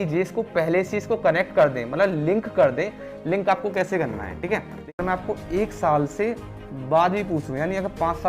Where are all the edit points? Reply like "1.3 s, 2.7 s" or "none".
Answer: 5.0 s